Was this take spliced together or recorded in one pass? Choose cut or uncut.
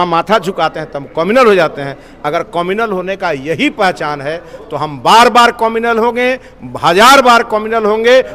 uncut